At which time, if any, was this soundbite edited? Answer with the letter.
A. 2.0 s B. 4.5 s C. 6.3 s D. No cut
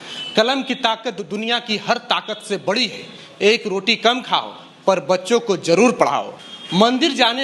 C